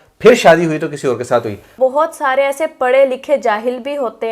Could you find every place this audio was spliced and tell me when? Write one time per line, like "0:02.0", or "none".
0:01.7